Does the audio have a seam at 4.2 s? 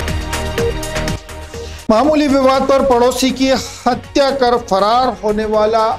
no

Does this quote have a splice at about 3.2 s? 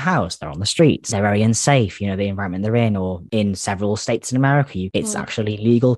yes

